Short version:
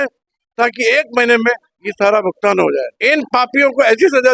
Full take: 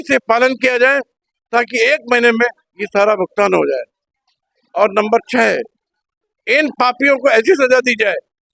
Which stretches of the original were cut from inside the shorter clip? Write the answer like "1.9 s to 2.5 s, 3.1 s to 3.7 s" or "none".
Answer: 3.9 s to 6.4 s